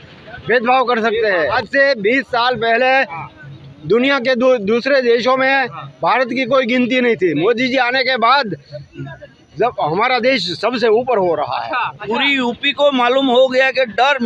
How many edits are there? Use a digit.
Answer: 2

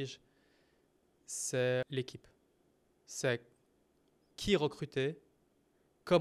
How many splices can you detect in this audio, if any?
2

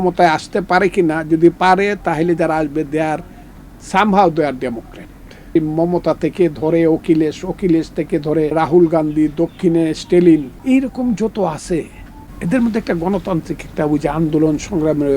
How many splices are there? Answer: 3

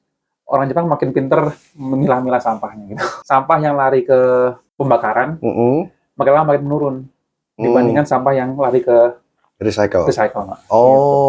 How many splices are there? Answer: 2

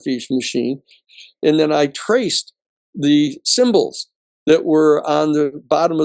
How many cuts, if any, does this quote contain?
1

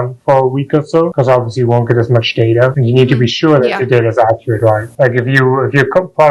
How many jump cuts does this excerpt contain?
3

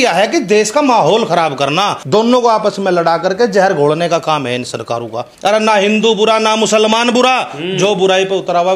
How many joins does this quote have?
2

